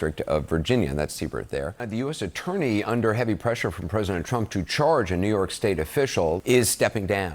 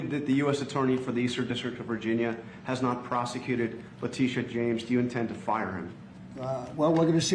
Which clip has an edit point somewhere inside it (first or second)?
first